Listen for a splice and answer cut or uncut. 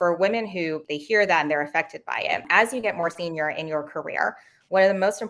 cut